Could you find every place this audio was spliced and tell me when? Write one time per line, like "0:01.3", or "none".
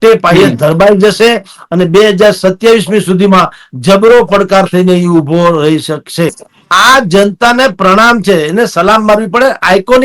0:06.5

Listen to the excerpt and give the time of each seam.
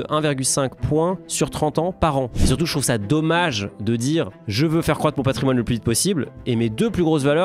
0:02.4

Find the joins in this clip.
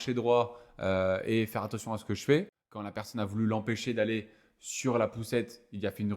0:03.0

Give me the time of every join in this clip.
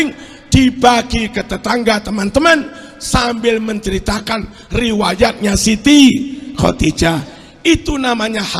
none

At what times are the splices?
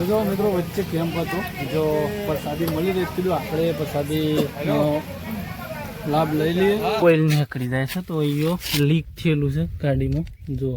0:07.0

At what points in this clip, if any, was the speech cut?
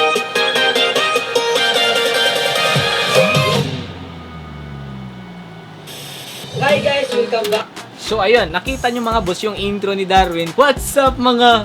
0:08.5
0:10.5

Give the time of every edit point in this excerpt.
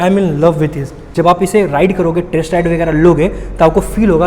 0:01.1

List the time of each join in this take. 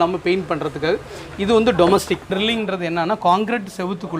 0:02.3

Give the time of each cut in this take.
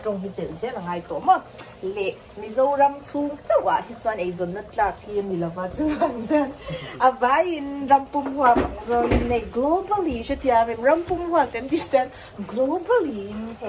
none

